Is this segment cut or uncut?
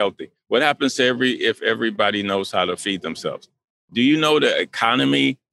uncut